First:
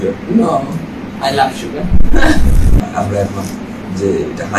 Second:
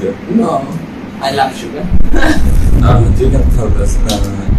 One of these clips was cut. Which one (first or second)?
first